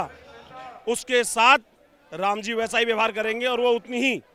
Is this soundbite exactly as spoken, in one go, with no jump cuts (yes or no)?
yes